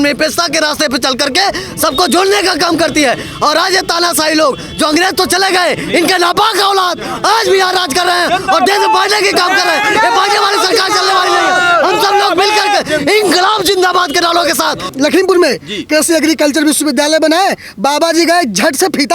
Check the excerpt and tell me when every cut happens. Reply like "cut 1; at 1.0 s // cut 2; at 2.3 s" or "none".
none